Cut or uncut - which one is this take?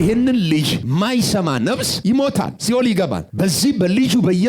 cut